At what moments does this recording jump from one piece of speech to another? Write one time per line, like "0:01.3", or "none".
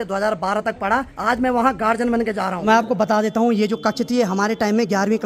0:01.1
0:02.6